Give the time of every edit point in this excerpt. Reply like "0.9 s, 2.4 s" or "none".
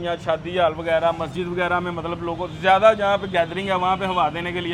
none